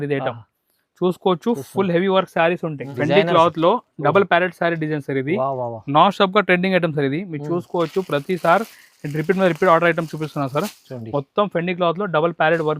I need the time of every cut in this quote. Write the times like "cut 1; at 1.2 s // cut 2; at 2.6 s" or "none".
cut 1; at 2.8 s